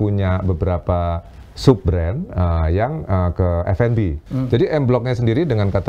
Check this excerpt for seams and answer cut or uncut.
cut